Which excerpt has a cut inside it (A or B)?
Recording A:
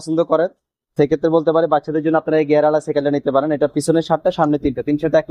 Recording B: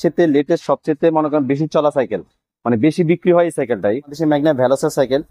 B